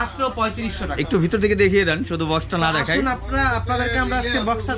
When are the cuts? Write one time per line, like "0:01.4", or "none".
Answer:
none